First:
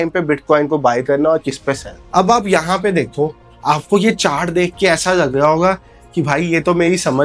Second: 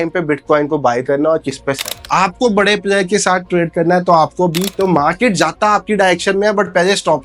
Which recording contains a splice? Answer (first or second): second